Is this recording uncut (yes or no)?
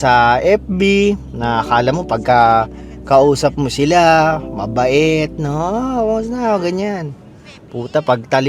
yes